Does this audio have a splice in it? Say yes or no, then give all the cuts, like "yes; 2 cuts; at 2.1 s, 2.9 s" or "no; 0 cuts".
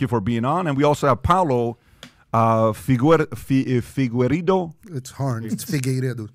no; 0 cuts